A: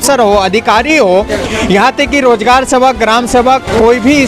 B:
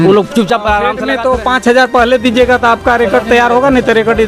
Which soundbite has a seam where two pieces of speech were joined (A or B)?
B